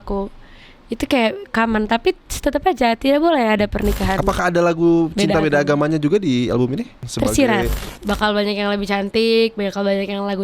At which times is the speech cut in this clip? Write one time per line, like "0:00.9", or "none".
0:07.0
0:07.9